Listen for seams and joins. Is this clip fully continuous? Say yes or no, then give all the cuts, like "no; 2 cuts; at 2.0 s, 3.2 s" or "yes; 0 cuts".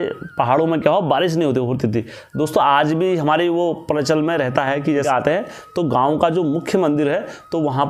no; 1 cut; at 5.1 s